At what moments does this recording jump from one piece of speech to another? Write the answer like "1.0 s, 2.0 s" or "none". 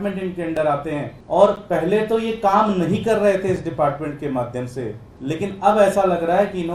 1.1 s, 5.1 s